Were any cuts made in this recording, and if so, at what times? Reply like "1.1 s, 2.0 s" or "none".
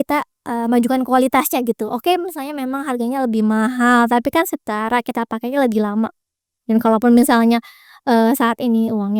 none